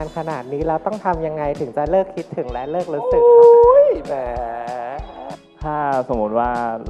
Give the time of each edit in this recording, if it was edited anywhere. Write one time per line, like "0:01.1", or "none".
0:05.3